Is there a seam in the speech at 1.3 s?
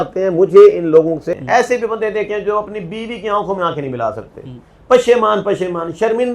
yes; 1 cut; at 1.3 s

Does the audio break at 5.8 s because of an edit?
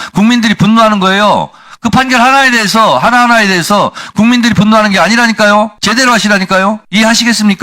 yes; 2 cuts; at 5.8 s, 6.8 s

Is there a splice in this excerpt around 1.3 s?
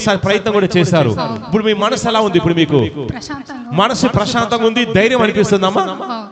no; 0 cuts

